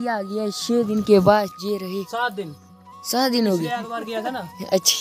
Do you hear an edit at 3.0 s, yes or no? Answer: no